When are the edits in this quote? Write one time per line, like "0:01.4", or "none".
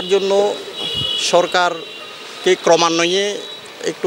none